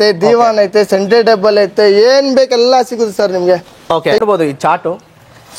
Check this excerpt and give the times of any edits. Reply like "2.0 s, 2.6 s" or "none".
4.2 s